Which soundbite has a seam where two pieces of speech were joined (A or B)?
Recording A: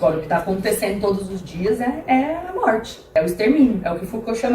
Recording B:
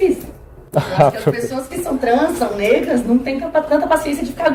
A